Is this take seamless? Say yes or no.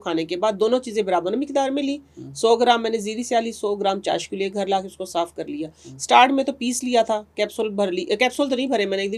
yes